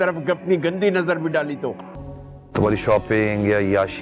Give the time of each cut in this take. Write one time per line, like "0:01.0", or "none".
0:01.9